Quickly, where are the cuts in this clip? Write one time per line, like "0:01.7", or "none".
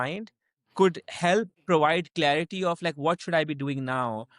0:01.6